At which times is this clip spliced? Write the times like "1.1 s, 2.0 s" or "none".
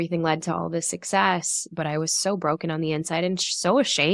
none